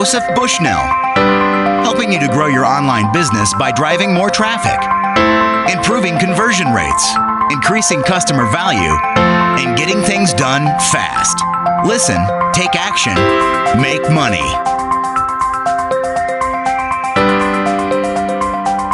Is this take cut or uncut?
uncut